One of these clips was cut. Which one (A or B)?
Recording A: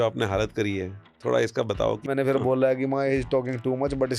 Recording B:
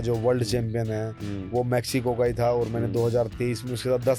A